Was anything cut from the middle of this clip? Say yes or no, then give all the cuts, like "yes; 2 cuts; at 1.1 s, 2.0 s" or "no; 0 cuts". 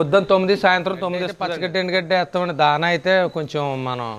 yes; 1 cut; at 1.4 s